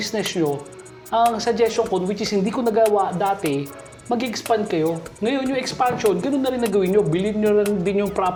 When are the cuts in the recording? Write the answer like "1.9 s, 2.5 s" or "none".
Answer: none